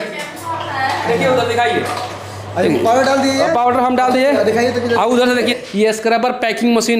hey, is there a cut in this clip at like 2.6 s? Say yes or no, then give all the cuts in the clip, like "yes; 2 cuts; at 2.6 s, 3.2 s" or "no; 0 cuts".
no; 1 cut; at 5.5 s